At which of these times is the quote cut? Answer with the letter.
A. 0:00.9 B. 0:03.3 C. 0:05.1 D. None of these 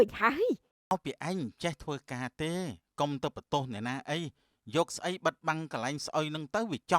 A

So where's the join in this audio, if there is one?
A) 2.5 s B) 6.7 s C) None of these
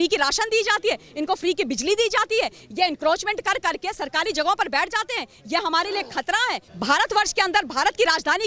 B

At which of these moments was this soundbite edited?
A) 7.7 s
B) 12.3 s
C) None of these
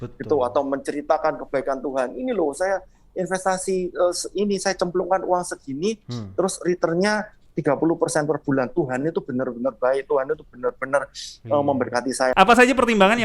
B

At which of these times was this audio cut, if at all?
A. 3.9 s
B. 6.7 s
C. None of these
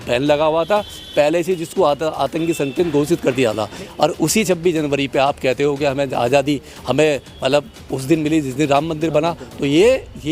A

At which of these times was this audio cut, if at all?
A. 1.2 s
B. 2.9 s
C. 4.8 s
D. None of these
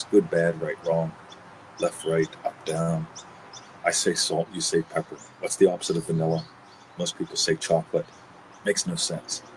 D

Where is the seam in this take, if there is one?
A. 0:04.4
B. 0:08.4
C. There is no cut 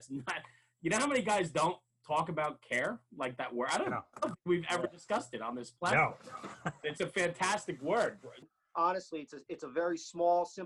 B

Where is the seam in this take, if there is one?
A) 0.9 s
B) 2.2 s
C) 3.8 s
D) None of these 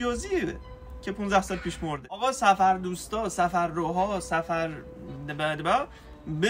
B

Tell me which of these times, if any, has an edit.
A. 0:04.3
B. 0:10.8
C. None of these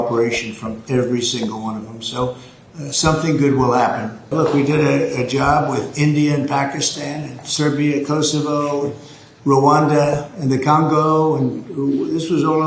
A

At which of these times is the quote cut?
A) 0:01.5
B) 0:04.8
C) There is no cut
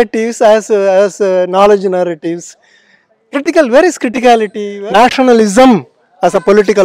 B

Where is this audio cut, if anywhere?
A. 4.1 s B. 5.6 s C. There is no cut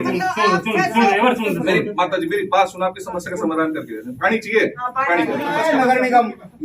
B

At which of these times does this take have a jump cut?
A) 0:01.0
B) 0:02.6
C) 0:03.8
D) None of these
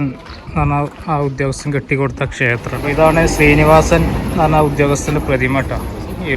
B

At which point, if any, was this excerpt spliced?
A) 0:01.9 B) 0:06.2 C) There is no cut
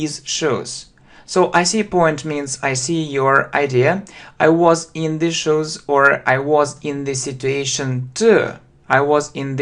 A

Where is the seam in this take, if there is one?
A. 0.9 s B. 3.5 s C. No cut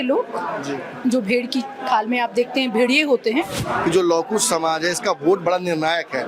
B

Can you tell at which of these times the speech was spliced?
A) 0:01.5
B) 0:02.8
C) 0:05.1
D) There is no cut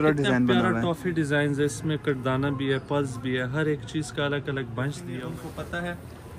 C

